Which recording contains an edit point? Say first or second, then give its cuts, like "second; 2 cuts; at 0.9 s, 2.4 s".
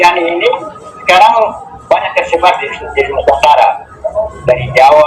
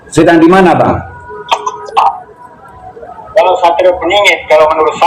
second; 1 cut; at 1.8 s